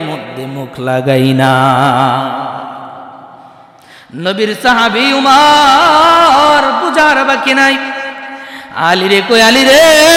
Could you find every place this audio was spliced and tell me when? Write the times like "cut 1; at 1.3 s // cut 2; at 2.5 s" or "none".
none